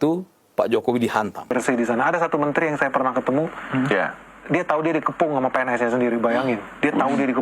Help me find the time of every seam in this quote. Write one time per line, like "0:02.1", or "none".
0:01.5